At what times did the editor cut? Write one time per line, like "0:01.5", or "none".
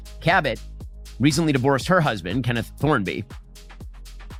none